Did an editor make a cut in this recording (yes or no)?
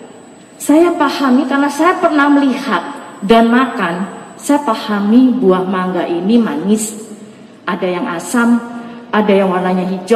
no